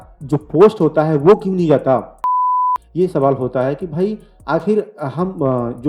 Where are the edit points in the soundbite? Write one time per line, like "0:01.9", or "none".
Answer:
0:02.5